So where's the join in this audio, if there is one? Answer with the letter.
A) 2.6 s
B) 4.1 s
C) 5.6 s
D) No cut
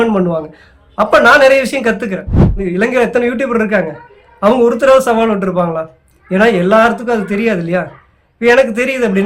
A